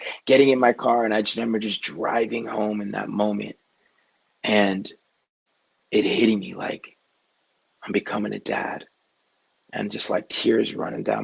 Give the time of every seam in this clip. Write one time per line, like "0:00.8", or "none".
none